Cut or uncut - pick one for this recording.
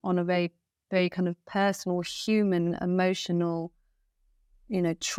uncut